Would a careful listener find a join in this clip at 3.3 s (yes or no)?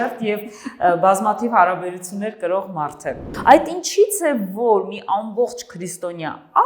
yes